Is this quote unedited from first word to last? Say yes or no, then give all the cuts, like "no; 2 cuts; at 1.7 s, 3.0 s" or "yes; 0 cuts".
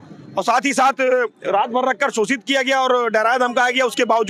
yes; 0 cuts